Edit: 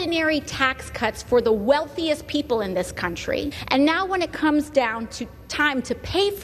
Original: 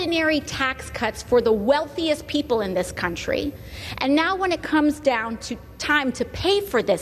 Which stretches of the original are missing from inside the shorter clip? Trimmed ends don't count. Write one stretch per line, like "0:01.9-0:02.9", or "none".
0:03.6-0:03.9